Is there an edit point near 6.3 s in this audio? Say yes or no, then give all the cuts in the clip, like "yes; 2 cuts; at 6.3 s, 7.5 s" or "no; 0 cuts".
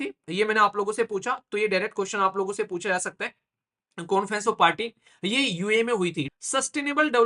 yes; 1 cut; at 6.3 s